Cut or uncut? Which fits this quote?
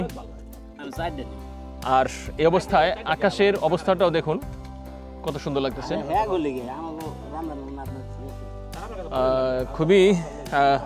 uncut